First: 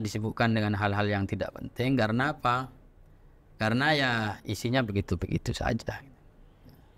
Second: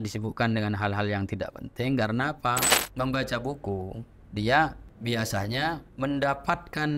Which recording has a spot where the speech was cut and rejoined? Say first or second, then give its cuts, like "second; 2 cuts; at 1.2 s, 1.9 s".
second; 3 cuts; at 2.8 s, 4.9 s, 5.9 s